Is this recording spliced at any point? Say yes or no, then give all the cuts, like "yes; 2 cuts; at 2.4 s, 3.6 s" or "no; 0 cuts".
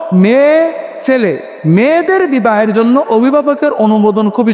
no; 0 cuts